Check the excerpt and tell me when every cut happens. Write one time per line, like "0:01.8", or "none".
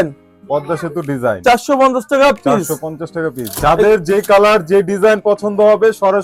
none